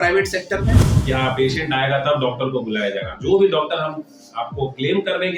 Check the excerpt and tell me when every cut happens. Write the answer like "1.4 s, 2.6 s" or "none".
0.9 s